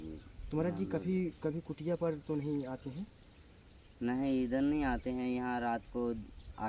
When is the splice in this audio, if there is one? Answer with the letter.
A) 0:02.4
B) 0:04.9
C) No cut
C